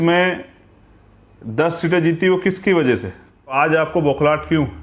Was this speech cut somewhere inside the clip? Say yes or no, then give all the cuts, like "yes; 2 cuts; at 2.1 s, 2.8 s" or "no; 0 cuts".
yes; 1 cut; at 3.5 s